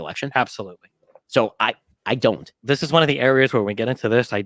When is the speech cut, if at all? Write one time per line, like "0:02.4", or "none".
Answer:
0:02.6